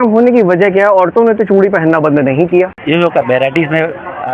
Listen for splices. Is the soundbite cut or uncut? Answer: cut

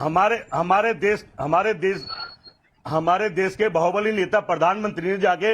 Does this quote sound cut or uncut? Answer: cut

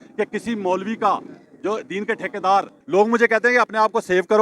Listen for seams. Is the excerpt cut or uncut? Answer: cut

